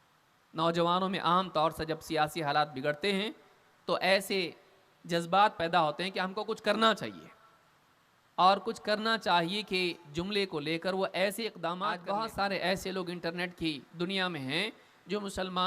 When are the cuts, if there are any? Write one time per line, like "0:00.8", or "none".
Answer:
0:11.8

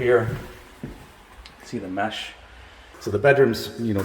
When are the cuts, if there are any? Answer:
0:02.9

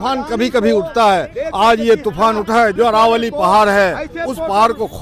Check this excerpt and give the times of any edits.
0:02.7

